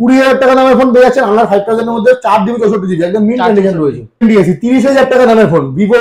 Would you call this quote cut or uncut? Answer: cut